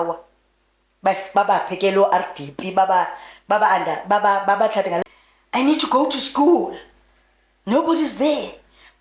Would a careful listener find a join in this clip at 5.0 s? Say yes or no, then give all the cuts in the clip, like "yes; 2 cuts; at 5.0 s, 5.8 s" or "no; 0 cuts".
yes; 1 cut; at 5.0 s